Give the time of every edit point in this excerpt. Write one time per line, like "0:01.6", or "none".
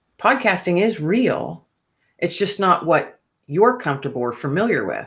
none